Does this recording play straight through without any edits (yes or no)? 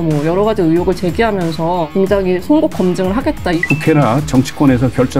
no